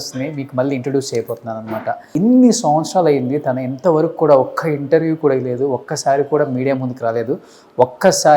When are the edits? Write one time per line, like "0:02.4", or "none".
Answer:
0:02.1